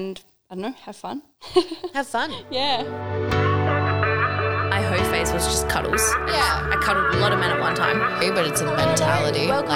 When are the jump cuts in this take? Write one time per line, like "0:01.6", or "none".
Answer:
0:02.9